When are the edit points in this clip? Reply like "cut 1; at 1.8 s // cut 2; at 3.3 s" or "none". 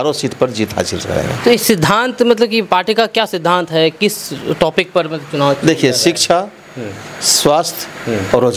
none